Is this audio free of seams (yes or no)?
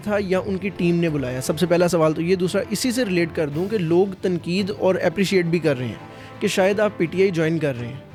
yes